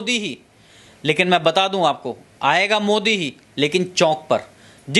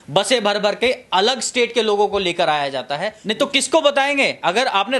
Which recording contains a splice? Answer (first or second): second